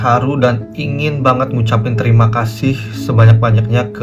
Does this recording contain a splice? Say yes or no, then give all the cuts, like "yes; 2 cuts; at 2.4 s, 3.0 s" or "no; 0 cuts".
no; 0 cuts